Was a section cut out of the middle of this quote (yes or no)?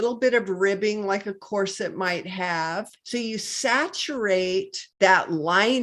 yes